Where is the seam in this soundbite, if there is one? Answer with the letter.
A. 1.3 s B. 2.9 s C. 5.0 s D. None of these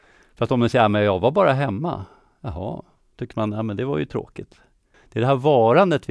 C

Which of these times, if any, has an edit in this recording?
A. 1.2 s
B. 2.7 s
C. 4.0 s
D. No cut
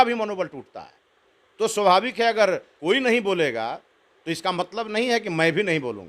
B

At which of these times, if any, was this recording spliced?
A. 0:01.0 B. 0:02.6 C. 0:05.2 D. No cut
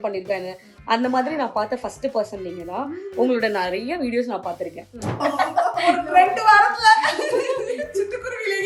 C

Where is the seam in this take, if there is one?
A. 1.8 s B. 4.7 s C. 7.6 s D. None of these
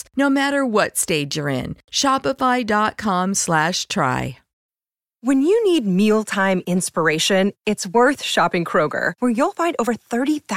B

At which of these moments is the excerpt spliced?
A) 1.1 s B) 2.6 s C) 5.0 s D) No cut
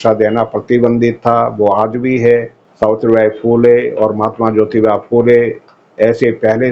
B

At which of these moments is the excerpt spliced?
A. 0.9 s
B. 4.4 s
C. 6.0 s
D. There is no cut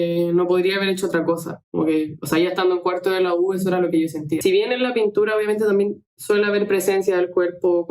B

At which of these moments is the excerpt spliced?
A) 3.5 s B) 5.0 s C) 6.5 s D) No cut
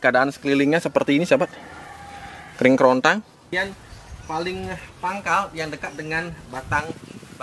A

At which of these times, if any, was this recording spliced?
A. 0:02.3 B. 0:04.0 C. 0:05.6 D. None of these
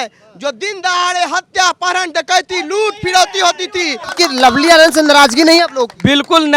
B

